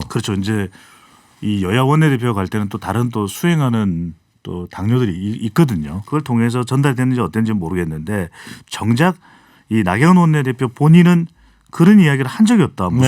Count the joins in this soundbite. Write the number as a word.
one